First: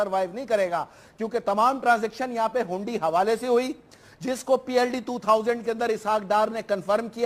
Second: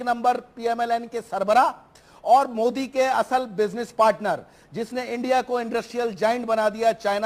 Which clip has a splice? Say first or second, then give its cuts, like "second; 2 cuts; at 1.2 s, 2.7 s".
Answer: second; 1 cut; at 5.7 s